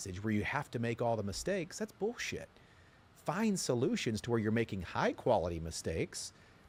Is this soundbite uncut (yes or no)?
yes